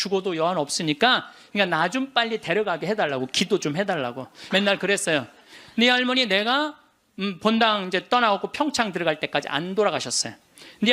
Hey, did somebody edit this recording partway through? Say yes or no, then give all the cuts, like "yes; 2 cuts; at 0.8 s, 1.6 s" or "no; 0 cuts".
yes; 2 cuts; at 1.4 s, 4.3 s